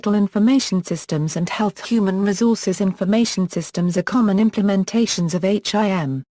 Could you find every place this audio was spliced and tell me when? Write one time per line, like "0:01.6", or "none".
0:03.6